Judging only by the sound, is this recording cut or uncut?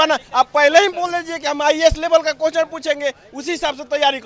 uncut